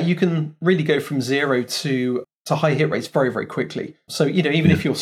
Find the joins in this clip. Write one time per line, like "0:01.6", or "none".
0:02.2
0:04.1